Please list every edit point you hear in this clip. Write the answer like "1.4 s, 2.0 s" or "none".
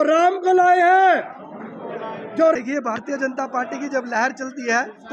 2.5 s